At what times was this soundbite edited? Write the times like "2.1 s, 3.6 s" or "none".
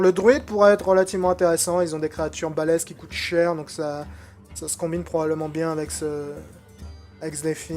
5.3 s